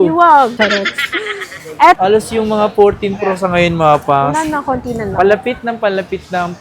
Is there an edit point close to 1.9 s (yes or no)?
yes